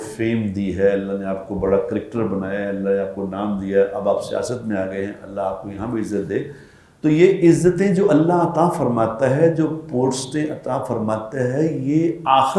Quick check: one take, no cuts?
yes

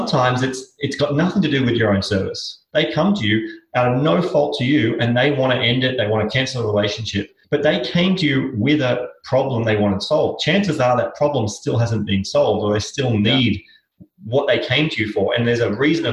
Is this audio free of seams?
no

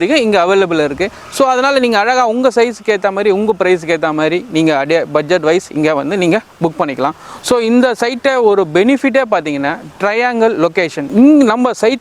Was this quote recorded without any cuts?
no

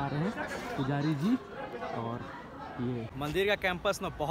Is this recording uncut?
no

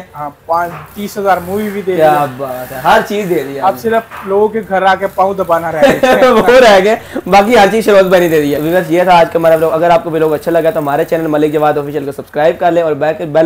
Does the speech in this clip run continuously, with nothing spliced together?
yes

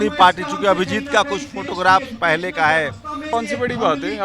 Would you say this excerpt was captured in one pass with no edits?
no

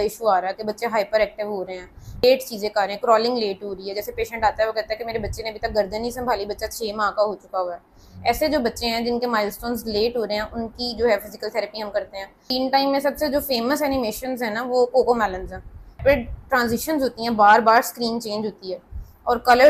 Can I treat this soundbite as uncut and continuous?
no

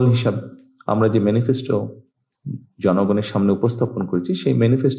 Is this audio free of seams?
yes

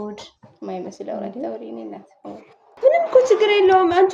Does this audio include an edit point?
yes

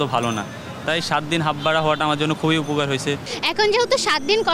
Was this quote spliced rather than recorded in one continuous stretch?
yes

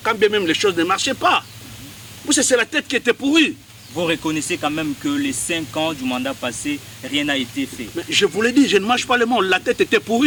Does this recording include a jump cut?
no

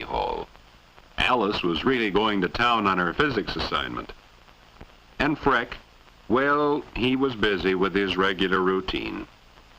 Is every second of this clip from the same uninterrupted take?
no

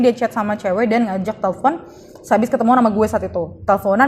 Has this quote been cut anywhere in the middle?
no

